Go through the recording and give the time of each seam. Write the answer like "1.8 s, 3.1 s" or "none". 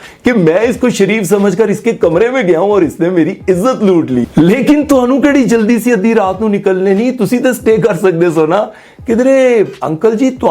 4.3 s